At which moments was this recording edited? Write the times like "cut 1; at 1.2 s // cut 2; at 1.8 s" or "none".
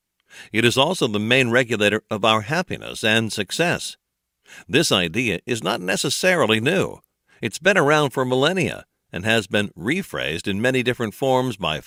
none